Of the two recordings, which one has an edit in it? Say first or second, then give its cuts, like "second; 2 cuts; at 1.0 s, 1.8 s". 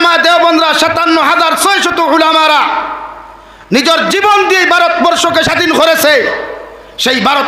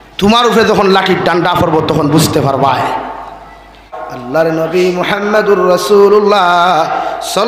second; 1 cut; at 3.9 s